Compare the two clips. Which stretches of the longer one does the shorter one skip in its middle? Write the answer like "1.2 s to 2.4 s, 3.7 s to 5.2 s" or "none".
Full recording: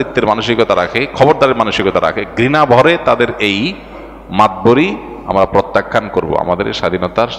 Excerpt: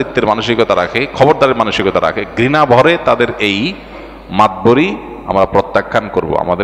none